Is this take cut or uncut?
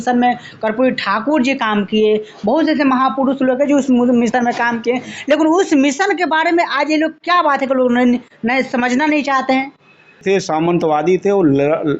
cut